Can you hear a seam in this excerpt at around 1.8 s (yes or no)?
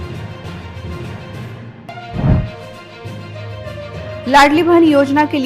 yes